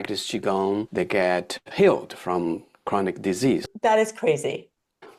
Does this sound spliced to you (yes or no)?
yes